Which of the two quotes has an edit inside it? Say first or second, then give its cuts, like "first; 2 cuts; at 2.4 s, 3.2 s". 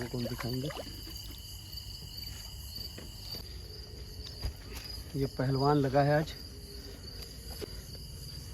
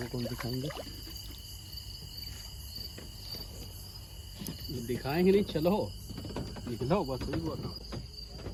first; 2 cuts; at 3.4 s, 7.6 s